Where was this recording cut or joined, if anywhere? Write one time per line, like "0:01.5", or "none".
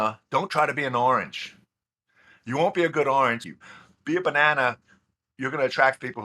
0:03.6